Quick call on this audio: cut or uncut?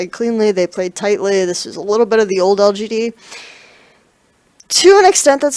cut